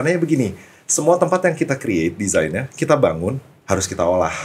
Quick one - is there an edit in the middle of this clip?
yes; 1 cut; at 3.5 s

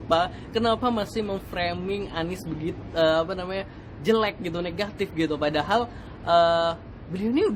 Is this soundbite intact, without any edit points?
yes; 0 cuts

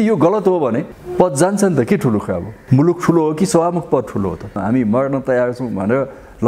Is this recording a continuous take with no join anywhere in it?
no; 2 cuts; at 2.5 s, 4.6 s

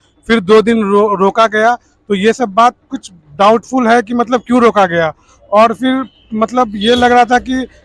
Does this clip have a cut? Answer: no; 0 cuts

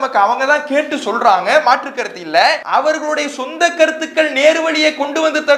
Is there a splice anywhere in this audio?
yes; 1 cut; at 2.6 s

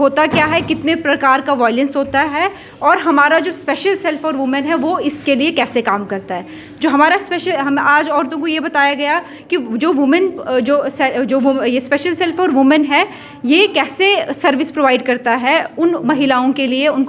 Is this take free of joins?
yes; 0 cuts

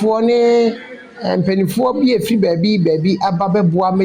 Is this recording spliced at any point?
no; 0 cuts

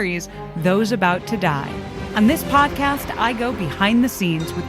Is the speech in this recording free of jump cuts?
no; 1 cut; at 2.0 s

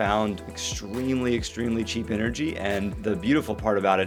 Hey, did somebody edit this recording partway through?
no; 0 cuts

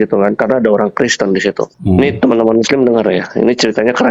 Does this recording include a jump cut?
yes; 1 cut; at 1.7 s

